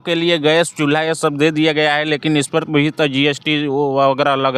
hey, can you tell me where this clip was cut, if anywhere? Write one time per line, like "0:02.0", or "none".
none

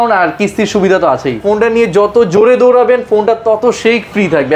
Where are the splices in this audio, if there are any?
0:01.4

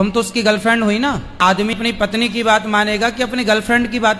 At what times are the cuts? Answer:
0:01.8

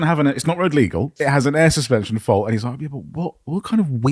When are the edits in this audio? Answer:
0:01.2

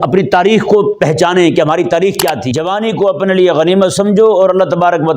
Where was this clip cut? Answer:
0:02.5

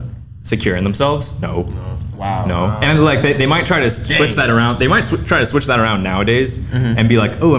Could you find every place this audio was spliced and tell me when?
none

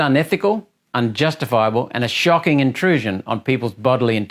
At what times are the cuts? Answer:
none

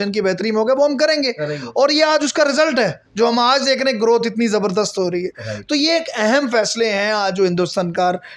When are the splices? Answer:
none

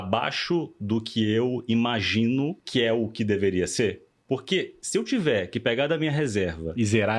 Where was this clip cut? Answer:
0:02.6

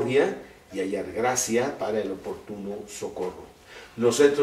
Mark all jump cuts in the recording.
0:01.4

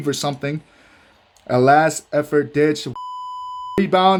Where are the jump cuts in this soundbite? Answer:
none

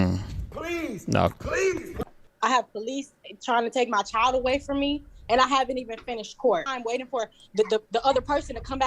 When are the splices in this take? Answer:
0:02.3

